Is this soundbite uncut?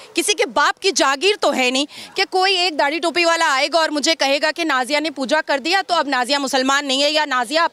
yes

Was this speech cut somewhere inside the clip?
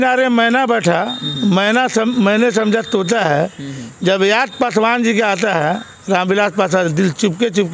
no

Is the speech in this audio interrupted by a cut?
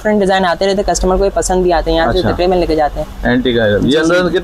no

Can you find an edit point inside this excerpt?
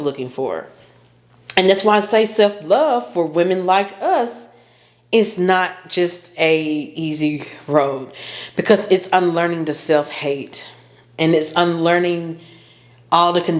no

